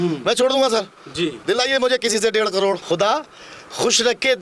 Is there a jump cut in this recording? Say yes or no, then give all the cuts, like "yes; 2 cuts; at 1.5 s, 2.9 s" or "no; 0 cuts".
yes; 1 cut; at 2.8 s